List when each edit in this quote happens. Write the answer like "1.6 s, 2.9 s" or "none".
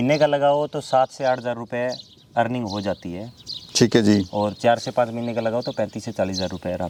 none